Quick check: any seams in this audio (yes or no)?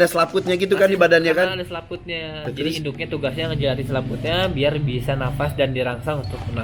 no